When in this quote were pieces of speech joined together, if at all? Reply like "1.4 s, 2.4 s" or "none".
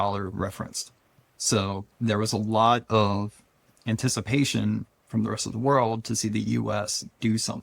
1.9 s